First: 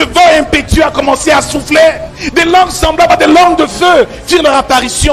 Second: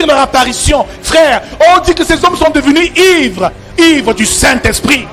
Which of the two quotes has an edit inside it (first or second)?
first